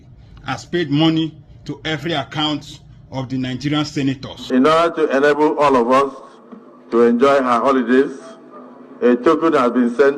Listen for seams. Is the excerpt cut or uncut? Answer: cut